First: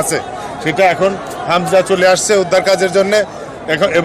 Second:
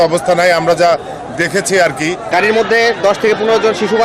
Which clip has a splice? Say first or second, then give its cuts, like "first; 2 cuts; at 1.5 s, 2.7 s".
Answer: second; 1 cut; at 2.3 s